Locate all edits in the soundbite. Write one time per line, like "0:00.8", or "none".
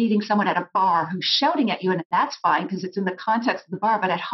0:02.1